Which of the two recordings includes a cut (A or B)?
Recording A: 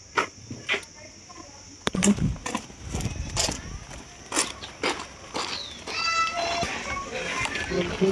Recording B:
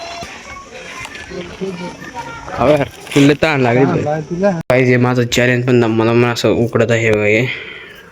B